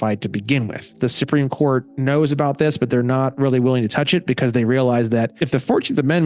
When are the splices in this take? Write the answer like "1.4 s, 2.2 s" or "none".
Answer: 0.9 s, 5.4 s